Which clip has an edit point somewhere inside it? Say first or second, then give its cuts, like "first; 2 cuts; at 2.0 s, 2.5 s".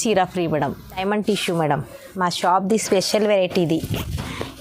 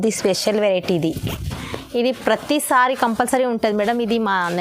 first; 1 cut; at 1.0 s